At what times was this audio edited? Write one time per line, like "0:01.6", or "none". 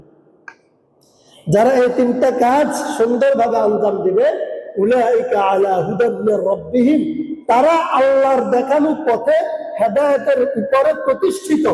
none